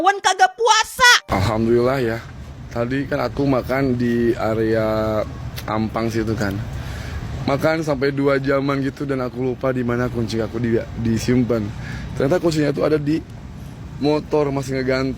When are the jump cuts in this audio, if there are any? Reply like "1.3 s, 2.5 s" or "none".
1.2 s